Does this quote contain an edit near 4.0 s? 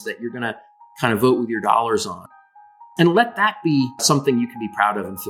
yes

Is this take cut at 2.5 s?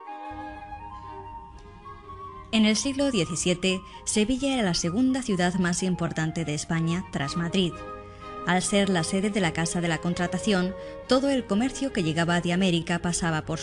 no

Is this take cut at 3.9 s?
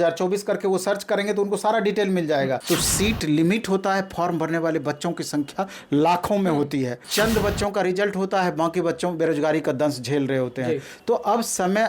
no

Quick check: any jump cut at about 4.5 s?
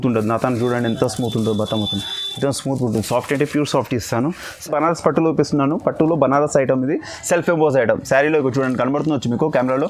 yes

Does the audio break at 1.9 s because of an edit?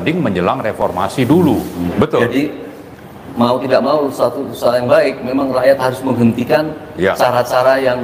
yes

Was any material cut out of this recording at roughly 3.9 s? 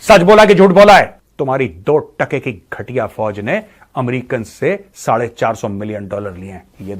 no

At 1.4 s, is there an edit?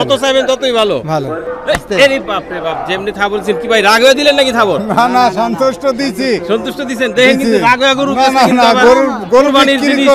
yes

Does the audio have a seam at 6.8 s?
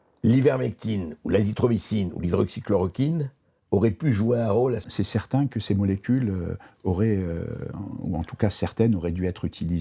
no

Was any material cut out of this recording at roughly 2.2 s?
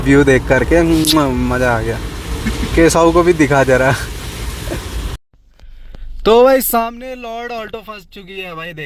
no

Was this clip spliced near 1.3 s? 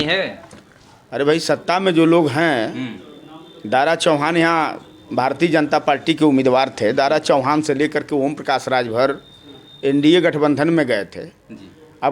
no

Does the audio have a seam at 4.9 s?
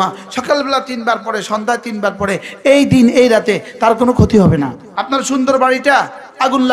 yes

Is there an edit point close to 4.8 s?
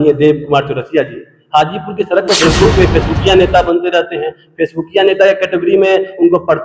no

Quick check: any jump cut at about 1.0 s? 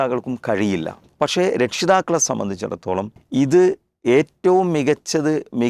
yes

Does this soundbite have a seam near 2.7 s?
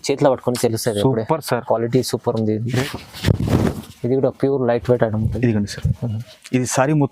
yes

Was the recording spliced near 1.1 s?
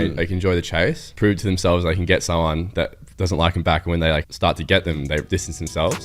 yes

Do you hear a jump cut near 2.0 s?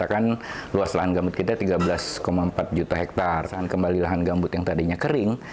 no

